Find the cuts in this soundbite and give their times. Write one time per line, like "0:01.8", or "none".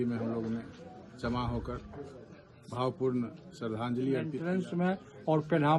0:04.4